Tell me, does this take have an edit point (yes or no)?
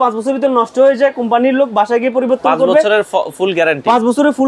no